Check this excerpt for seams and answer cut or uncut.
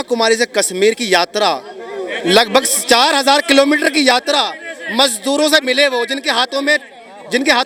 uncut